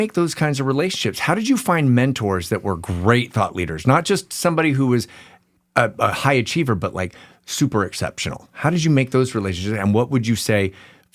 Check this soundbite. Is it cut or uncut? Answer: uncut